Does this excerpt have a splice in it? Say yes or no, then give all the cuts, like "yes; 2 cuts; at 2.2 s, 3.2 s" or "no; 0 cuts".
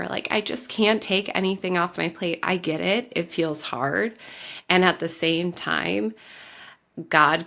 no; 0 cuts